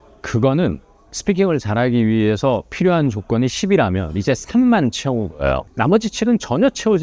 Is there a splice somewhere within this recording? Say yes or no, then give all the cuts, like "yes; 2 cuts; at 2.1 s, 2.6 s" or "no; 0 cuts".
no; 0 cuts